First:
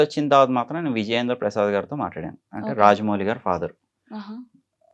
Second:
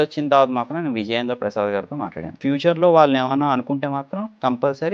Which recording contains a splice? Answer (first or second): second